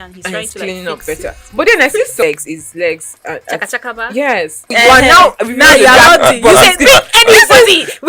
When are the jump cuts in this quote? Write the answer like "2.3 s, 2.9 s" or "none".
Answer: 2.2 s, 4.7 s